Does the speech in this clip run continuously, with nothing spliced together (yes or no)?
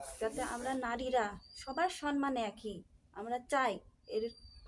yes